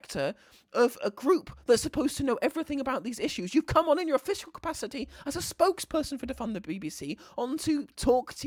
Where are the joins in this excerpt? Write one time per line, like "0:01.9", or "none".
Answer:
none